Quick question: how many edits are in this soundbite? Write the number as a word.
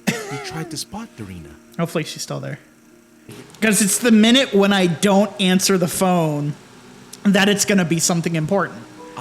one